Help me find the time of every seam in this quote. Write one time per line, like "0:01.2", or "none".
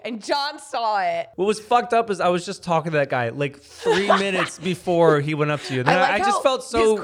0:01.3